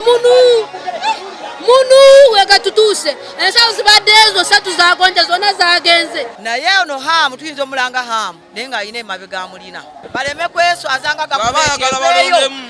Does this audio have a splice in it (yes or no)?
yes